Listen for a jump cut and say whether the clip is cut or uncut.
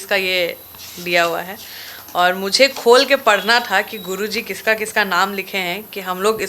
uncut